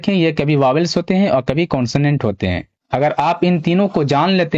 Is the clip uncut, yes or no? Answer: no